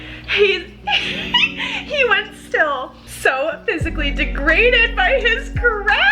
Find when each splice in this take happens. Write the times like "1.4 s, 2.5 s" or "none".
3.0 s